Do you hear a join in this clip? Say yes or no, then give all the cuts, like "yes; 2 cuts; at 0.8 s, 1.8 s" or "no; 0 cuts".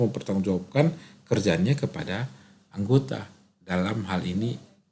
no; 0 cuts